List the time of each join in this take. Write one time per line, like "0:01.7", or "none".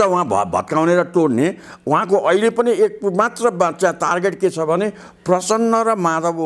none